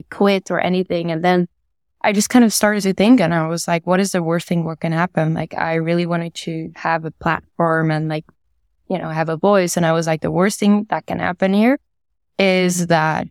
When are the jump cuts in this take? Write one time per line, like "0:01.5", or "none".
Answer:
none